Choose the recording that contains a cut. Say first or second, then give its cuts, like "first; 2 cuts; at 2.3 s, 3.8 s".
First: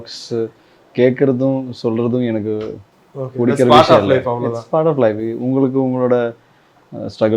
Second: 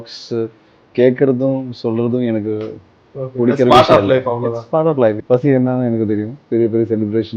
second; 2 cuts; at 5.2 s, 6.4 s